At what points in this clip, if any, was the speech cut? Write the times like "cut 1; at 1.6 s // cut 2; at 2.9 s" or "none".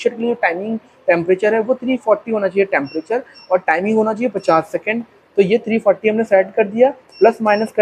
none